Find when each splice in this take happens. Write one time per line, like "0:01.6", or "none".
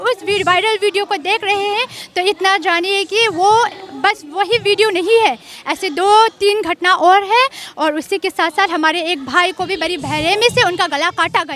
none